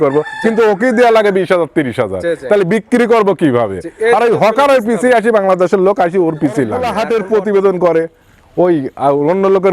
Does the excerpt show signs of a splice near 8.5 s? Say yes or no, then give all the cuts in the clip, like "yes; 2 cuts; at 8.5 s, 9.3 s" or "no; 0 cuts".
no; 1 cut; at 6.9 s